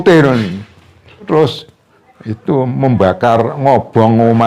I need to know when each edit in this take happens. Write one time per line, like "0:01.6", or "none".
0:01.3